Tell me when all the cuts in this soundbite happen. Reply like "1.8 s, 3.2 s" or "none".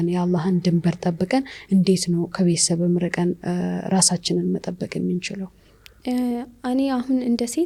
none